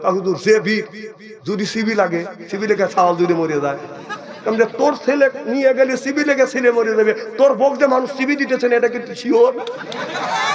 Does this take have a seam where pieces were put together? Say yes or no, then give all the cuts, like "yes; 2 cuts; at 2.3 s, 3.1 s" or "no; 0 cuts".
no; 0 cuts